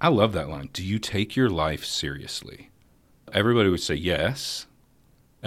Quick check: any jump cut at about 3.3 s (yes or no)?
yes